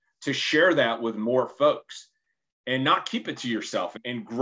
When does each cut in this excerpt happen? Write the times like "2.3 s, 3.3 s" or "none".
none